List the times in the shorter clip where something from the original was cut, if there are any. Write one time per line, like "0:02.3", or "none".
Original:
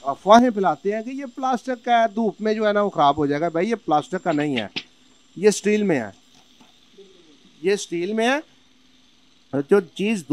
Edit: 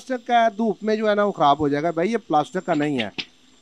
none

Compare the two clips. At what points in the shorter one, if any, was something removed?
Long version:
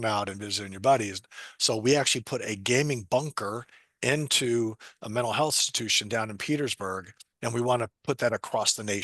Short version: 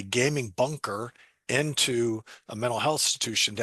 none

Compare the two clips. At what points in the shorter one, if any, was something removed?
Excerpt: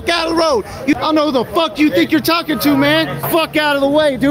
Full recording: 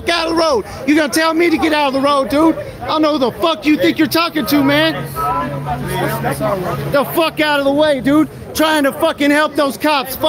0:00.9
0:03.3

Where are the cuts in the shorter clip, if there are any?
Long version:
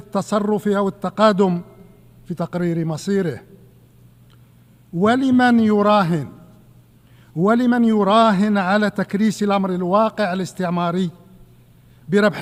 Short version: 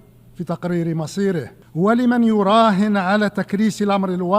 0:01.6

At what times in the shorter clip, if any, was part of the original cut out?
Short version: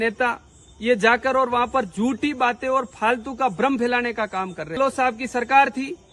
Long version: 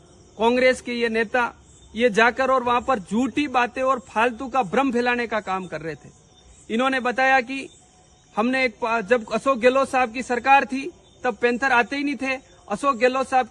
0:04.8

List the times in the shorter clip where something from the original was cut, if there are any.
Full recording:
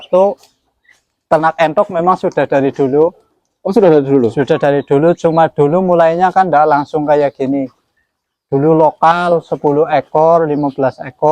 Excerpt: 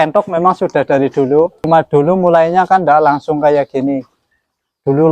0:01.7

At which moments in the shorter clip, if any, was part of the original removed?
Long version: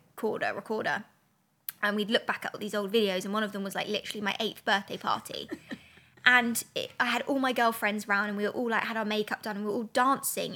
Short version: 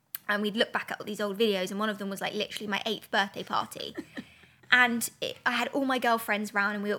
none

